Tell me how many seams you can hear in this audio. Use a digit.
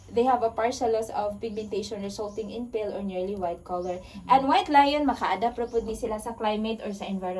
0